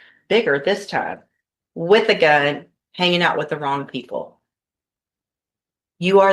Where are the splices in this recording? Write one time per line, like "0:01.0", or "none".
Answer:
none